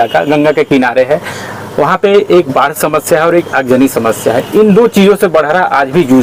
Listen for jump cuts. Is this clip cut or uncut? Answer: uncut